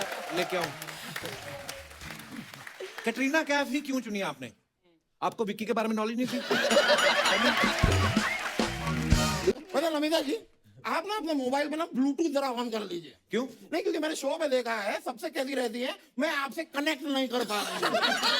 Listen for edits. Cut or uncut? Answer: cut